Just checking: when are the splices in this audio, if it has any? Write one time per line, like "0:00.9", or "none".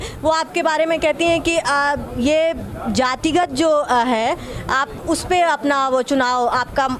none